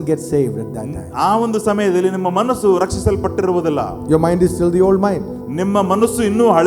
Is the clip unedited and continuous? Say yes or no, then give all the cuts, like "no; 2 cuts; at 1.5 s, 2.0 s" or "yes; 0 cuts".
yes; 0 cuts